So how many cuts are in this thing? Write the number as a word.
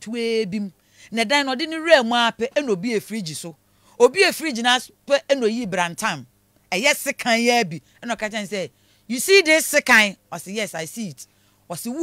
zero